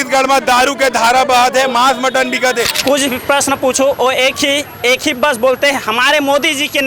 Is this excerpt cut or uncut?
cut